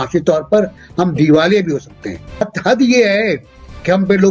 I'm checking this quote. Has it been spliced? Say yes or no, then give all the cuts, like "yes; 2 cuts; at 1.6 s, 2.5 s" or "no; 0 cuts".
yes; 1 cut; at 2.5 s